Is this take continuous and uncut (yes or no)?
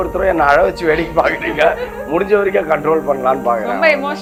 yes